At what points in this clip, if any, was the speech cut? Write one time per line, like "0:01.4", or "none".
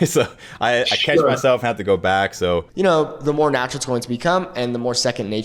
0:02.7